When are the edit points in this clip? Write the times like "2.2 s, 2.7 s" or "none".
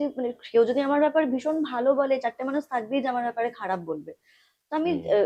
none